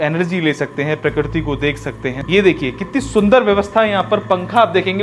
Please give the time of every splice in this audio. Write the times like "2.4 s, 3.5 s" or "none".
2.1 s